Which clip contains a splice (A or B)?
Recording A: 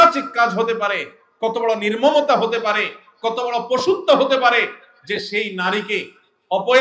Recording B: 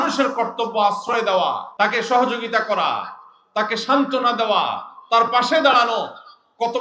B